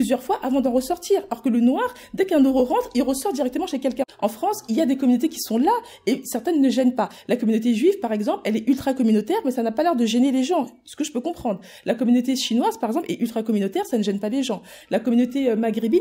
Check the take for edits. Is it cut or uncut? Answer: cut